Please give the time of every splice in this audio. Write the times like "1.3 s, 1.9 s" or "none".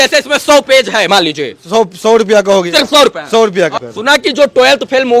3.8 s